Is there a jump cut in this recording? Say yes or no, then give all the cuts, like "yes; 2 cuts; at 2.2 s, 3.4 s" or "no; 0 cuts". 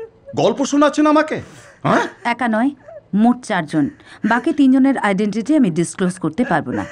no; 0 cuts